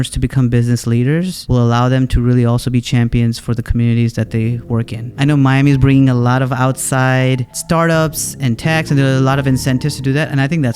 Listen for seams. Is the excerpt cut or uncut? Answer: cut